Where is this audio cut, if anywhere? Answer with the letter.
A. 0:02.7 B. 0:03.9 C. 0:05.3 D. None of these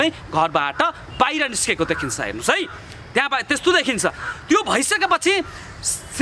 D